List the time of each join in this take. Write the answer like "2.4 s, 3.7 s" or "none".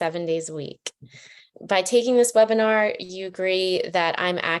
1.5 s